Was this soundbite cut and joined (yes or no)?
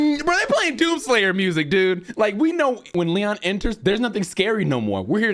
yes